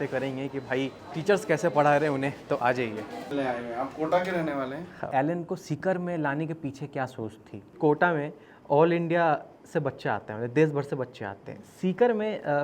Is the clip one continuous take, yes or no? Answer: no